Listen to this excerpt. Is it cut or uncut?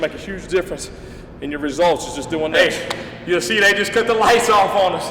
cut